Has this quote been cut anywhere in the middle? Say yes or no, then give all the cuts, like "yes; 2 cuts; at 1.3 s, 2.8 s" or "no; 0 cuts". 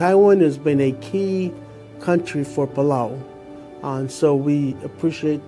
no; 0 cuts